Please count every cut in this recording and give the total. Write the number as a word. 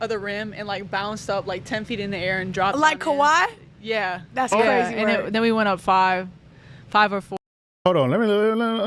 zero